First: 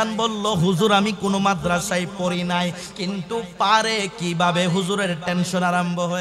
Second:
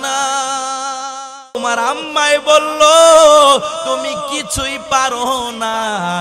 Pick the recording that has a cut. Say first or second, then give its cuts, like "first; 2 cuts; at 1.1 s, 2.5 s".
second; 1 cut; at 1.4 s